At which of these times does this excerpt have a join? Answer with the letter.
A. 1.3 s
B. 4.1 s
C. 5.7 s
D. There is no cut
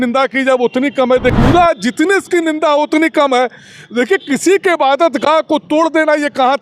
A